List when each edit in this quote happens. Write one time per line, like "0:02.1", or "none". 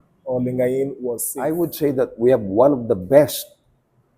0:01.3